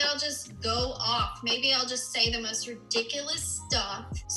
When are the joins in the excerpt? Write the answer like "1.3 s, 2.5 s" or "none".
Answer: none